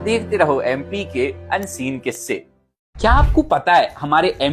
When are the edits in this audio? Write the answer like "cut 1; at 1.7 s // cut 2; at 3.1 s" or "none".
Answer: cut 1; at 2.9 s